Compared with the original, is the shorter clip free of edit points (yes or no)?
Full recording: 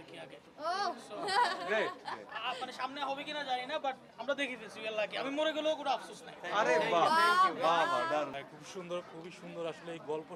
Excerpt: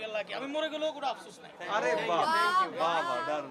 yes